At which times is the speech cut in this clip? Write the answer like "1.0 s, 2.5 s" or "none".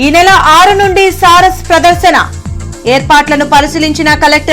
none